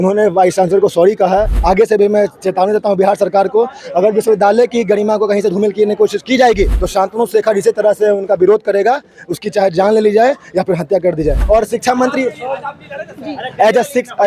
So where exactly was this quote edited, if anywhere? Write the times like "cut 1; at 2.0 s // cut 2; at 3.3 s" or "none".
cut 1; at 1.5 s // cut 2; at 6.8 s // cut 3; at 11.4 s

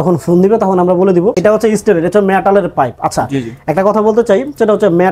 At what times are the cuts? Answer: cut 1; at 1.4 s

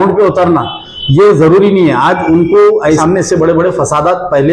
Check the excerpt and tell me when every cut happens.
cut 1; at 3.0 s

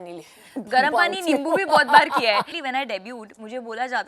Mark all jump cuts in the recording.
cut 1; at 2.5 s

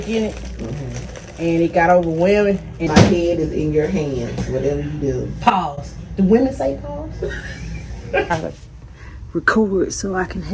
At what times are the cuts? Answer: cut 1; at 2.8 s // cut 2; at 8.3 s

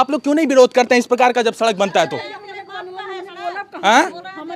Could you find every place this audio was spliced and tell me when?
none

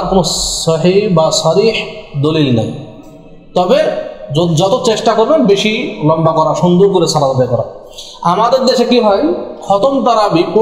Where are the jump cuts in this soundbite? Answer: none

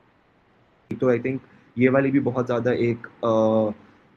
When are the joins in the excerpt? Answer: cut 1; at 1.0 s

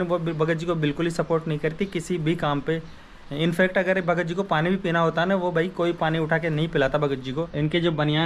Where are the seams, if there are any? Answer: cut 1; at 7.1 s

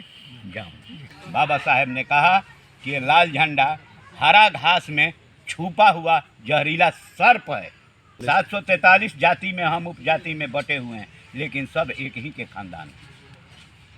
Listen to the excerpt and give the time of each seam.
cut 1; at 1.1 s // cut 2; at 8.1 s

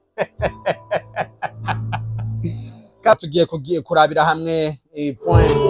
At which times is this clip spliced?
cut 1; at 3.1 s

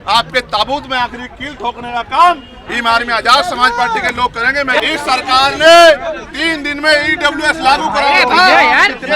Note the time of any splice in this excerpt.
cut 1; at 4.8 s

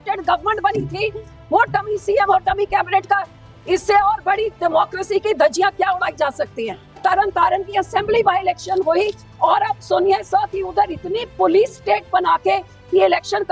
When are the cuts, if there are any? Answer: cut 1; at 6.9 s

